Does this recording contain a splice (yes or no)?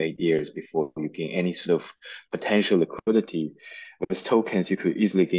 no